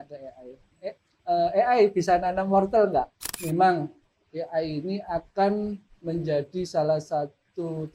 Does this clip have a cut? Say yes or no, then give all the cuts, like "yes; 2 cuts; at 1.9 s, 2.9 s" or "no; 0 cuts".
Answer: yes; 1 cut; at 3.4 s